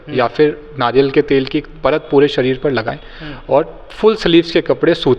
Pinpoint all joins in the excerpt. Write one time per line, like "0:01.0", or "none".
none